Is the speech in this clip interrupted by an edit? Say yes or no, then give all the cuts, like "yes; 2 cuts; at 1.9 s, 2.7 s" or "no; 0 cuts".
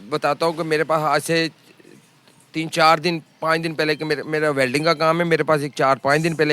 yes; 1 cut; at 1.5 s